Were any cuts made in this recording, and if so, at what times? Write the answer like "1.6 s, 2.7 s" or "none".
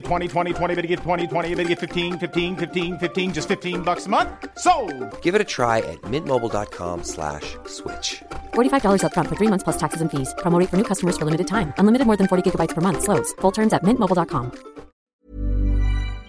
15.1 s